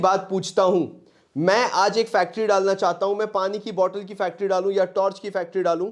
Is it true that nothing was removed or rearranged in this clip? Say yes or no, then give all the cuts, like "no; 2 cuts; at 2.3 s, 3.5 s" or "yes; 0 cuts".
yes; 0 cuts